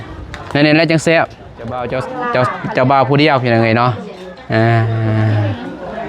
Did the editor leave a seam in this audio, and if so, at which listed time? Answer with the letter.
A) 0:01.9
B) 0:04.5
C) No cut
A